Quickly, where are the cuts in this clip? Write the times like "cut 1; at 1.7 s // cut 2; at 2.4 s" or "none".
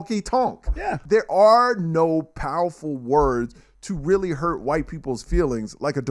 cut 1; at 1.0 s